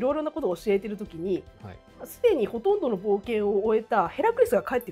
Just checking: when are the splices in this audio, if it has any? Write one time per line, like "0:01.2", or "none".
none